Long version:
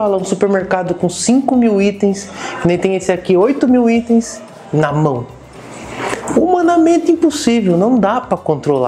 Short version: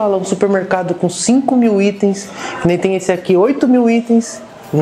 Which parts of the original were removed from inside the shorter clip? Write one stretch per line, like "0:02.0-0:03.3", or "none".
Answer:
none